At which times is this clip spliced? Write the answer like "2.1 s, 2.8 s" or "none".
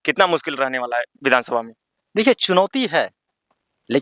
none

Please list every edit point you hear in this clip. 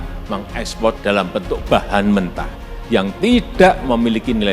1.0 s

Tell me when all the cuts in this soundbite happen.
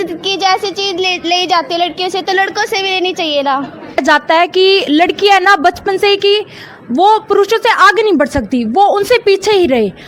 4.0 s

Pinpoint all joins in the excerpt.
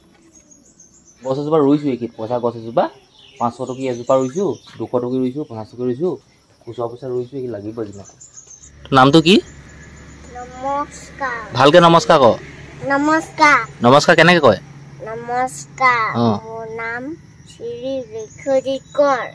1.3 s, 8.8 s

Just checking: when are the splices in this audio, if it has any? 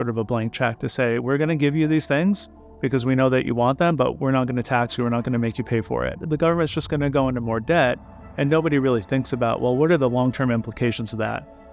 6.3 s

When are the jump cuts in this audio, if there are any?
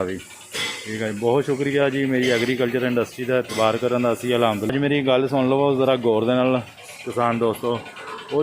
4.7 s

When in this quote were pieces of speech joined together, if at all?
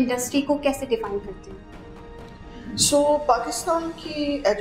none

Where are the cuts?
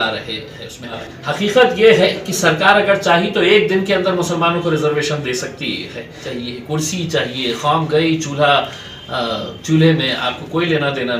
1.1 s, 6.3 s

